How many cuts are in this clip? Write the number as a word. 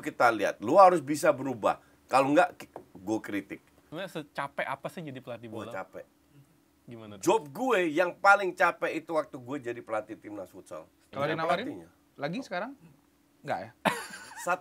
two